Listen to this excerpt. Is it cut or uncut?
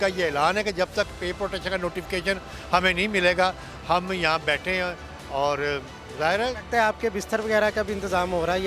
uncut